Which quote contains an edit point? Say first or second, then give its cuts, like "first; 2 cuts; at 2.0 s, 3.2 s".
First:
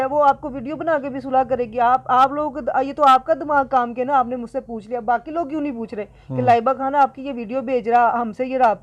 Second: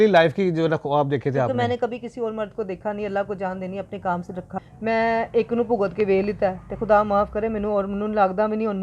second; 1 cut; at 4.5 s